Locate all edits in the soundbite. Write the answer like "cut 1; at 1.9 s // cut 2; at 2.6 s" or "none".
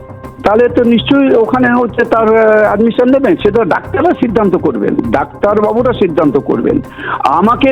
none